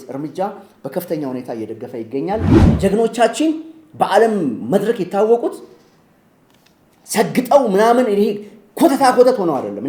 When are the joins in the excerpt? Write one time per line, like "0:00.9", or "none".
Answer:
0:02.6